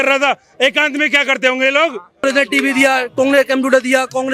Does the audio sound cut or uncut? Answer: cut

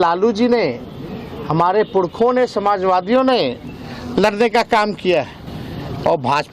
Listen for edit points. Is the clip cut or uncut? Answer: uncut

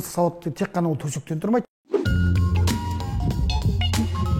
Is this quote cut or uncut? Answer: cut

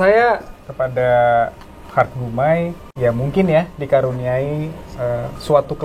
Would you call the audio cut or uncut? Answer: cut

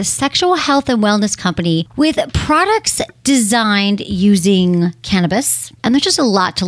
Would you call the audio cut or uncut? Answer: cut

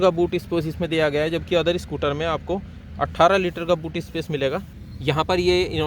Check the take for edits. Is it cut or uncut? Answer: cut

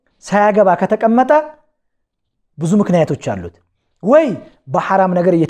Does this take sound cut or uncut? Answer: uncut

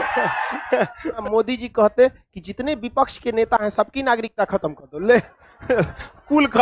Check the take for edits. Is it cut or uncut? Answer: cut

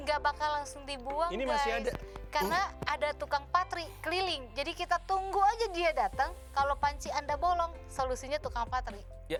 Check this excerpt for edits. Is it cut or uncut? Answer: uncut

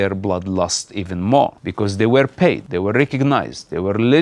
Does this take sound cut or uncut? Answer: cut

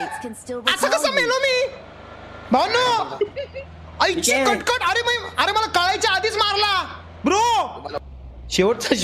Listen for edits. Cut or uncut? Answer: cut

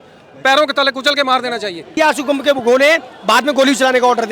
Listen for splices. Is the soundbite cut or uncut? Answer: cut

